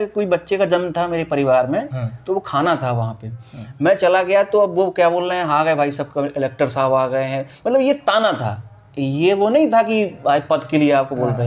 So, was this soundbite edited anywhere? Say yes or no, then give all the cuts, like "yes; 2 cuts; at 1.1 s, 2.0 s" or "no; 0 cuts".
no; 0 cuts